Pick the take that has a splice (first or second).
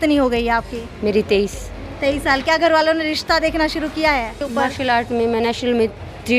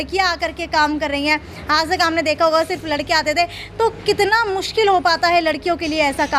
first